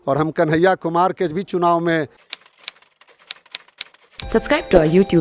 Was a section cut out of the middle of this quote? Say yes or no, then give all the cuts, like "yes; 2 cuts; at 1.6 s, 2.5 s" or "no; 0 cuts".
yes; 1 cut; at 2.2 s